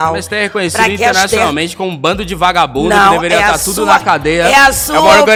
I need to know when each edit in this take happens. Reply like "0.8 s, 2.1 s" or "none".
none